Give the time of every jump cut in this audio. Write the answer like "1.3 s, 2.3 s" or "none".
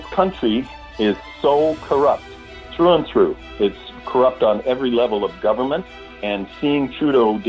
none